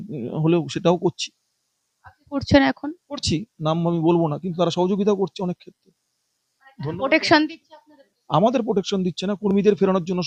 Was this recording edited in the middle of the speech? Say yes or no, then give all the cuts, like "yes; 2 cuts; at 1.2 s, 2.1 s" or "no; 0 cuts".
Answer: no; 0 cuts